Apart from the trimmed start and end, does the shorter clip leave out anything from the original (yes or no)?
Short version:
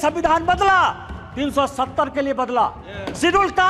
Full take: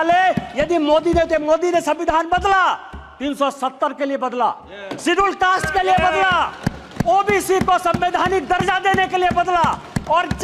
no